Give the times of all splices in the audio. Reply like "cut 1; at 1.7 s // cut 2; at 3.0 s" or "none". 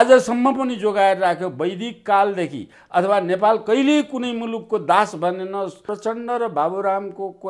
cut 1; at 5.8 s